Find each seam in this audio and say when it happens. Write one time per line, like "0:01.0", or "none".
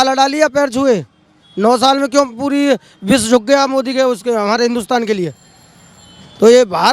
none